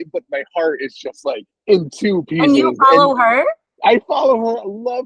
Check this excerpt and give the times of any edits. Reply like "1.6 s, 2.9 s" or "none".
1.5 s, 3.6 s